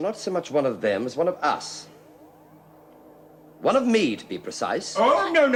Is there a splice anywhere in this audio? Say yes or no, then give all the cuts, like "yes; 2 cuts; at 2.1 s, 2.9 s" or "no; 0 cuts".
no; 0 cuts